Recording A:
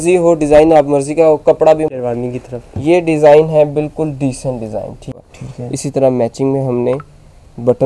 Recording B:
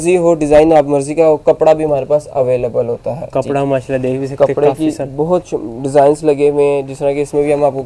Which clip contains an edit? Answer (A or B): A